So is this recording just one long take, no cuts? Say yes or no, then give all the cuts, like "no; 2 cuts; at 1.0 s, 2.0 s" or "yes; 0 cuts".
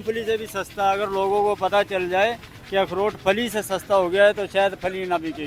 yes; 0 cuts